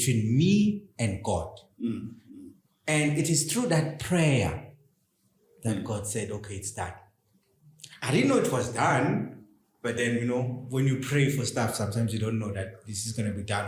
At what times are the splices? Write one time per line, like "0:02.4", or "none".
none